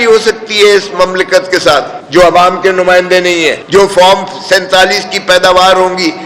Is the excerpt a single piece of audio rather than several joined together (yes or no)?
no